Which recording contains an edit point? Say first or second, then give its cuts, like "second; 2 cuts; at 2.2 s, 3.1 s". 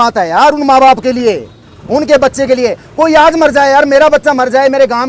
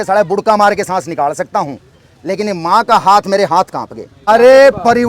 second; 1 cut; at 4.1 s